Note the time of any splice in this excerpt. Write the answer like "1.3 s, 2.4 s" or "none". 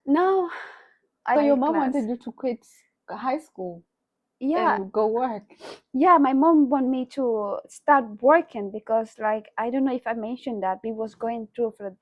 1.4 s